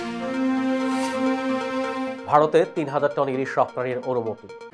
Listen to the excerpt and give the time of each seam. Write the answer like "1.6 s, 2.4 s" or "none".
2.1 s